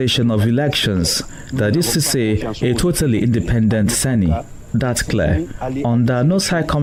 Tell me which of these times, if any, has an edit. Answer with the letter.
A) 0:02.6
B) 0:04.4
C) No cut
C